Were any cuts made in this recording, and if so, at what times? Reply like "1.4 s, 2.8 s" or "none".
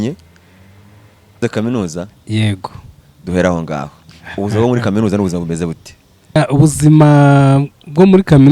1.4 s, 6.4 s